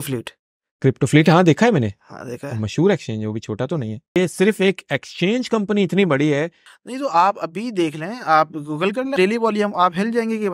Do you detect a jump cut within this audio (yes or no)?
yes